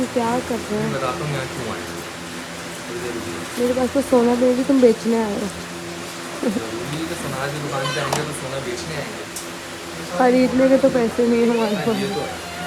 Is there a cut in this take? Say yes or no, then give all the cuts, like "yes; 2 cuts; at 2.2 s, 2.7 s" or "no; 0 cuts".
no; 0 cuts